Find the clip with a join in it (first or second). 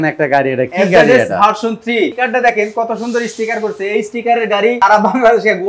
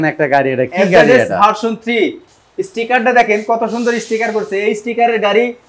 first